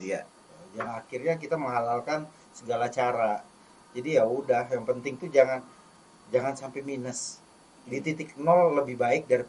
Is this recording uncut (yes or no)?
yes